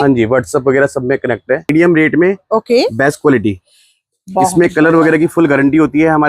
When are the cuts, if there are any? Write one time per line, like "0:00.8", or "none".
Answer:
0:01.7